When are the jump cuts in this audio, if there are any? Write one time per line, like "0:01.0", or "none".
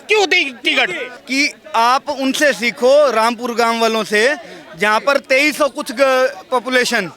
0:01.1